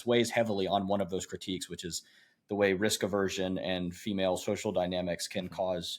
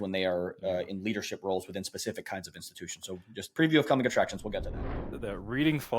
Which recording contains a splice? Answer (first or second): second